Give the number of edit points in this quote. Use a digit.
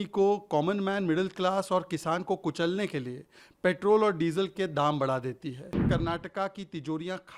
1